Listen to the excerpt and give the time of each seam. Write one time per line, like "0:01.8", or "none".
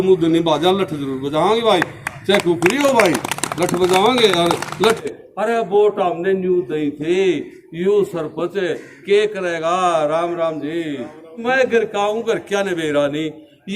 0:05.0
0:11.4